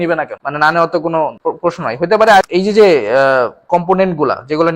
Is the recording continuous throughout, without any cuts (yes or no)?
no